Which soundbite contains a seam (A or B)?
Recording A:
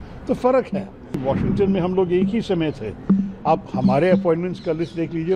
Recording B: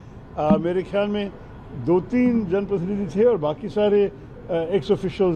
A